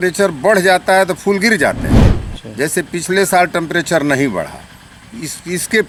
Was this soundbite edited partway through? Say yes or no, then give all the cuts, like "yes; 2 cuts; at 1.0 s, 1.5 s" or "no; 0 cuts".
no; 0 cuts